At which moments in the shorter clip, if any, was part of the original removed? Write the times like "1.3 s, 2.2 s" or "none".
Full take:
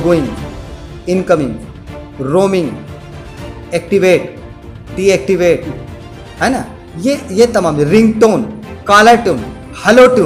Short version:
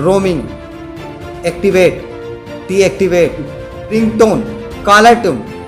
3.9 s